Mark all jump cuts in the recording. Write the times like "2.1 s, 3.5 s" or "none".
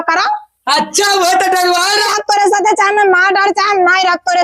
2.1 s